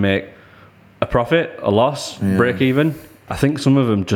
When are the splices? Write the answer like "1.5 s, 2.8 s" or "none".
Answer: 3.1 s